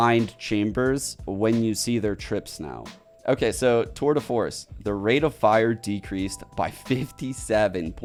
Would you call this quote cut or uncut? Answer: uncut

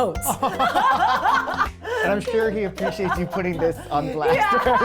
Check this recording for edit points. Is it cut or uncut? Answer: cut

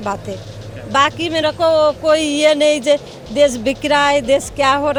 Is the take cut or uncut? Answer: uncut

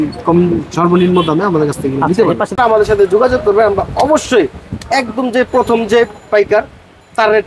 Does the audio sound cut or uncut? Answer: cut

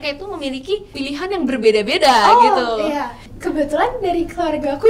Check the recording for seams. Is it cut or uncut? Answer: cut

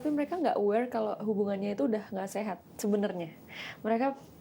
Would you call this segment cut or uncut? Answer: uncut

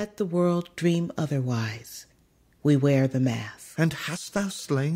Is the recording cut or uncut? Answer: cut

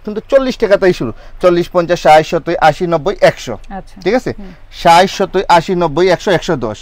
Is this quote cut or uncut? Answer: uncut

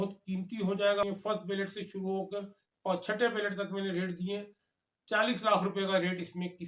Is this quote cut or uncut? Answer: cut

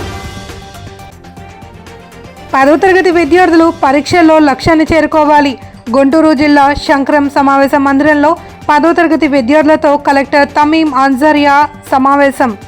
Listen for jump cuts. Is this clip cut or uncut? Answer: cut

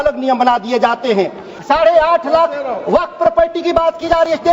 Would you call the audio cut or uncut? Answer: cut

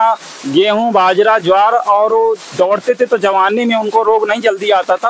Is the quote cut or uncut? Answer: uncut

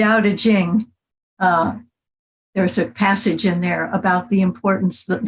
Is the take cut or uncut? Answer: uncut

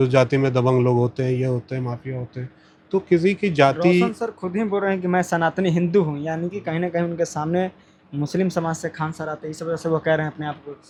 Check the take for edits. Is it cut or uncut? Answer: uncut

